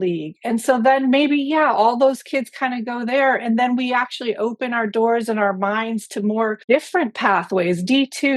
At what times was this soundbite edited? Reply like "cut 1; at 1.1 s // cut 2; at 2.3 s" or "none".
cut 1; at 6.6 s